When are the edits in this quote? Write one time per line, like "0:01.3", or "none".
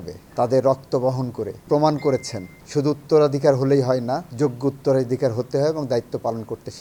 none